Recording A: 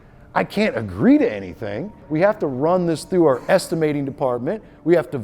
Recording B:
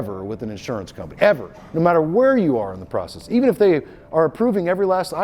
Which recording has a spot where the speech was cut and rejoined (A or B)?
A